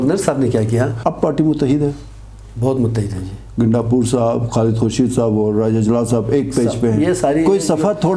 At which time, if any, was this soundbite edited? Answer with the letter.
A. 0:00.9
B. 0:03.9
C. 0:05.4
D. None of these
A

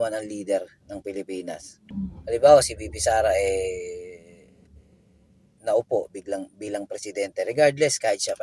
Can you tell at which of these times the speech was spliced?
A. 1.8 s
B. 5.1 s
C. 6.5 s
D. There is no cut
A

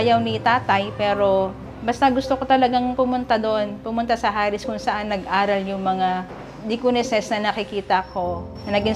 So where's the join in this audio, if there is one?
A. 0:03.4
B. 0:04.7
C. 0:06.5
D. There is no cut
D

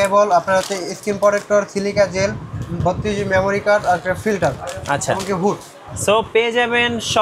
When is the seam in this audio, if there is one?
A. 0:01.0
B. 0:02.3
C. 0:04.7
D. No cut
D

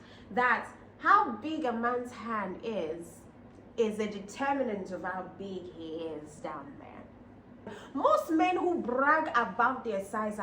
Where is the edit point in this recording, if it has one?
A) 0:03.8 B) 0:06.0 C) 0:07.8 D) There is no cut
C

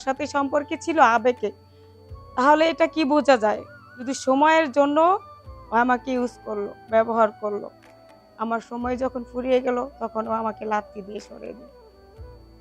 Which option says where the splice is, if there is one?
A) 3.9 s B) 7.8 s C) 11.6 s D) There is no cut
C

